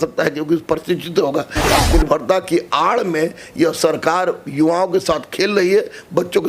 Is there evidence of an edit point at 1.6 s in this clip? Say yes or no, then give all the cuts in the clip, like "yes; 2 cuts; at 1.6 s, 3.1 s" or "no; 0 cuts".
yes; 1 cut; at 1.6 s